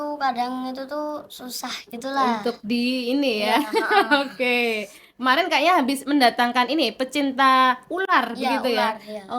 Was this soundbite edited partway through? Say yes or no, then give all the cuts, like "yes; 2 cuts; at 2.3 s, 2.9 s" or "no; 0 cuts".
no; 0 cuts